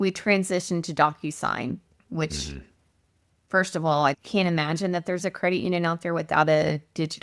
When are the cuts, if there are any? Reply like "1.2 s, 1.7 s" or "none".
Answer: 4.2 s